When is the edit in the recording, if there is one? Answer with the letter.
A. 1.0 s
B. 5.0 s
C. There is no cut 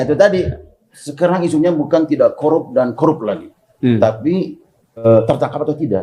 B